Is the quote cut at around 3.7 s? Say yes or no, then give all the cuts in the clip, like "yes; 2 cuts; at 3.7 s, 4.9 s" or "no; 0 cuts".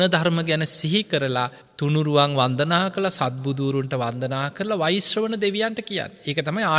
no; 1 cut; at 1.6 s